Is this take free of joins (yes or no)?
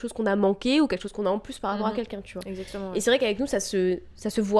yes